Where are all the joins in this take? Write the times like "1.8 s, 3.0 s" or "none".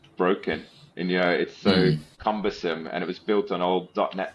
2.1 s